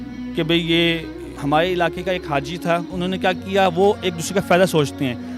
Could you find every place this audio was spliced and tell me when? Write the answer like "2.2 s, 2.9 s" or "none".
1.3 s, 2.9 s